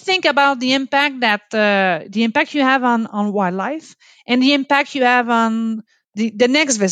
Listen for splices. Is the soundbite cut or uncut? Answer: uncut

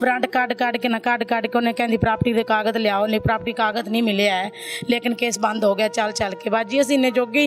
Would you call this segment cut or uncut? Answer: uncut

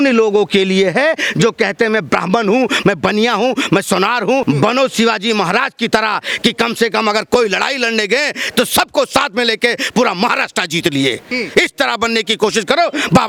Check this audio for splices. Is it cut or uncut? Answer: uncut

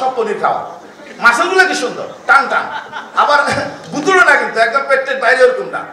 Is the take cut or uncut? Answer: uncut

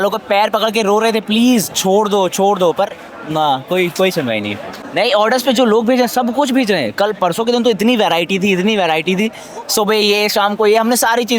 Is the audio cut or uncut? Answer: cut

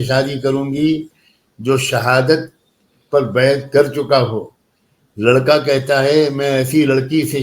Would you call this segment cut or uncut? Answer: uncut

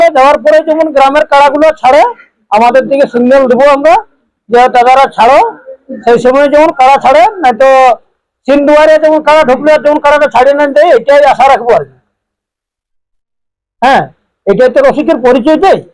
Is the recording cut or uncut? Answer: uncut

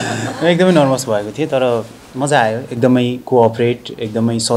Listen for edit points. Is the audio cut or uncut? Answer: uncut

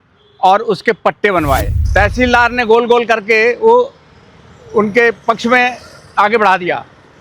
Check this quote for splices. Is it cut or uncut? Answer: cut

